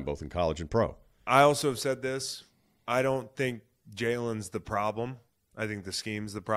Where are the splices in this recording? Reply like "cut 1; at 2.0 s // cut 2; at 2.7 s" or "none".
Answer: cut 1; at 1.2 s